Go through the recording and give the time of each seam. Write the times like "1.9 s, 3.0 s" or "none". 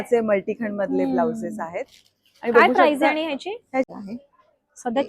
3.9 s